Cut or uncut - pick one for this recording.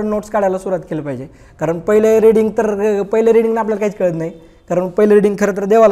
uncut